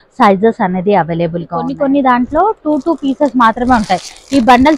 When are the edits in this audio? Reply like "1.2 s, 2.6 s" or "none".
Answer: 1.6 s

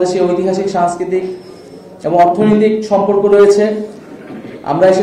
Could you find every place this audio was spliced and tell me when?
none

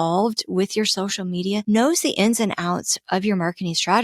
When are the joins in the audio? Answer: 1.6 s

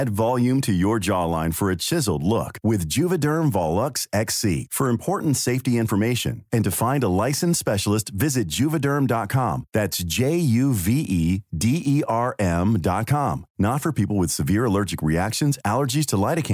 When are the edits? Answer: none

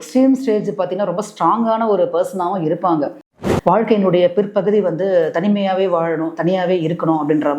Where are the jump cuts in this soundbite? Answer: 3.4 s

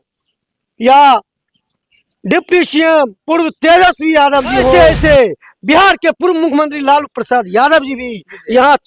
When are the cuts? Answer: 4.8 s

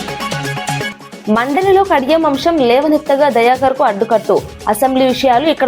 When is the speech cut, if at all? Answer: 0.9 s

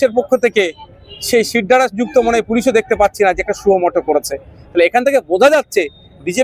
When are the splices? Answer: none

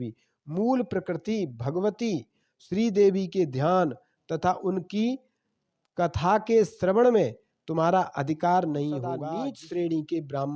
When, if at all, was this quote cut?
9.2 s

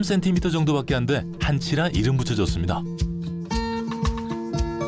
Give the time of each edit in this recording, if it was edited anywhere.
2.8 s

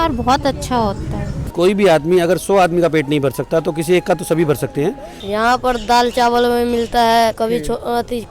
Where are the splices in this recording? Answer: 1.4 s, 5.1 s, 7.4 s

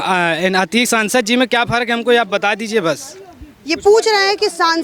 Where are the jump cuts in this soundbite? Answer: none

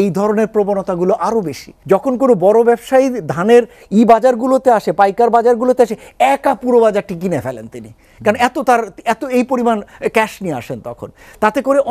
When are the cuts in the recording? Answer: 1.7 s

